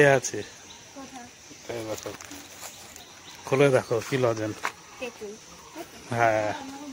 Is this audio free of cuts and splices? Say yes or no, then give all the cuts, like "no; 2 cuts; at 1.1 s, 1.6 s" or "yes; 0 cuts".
yes; 0 cuts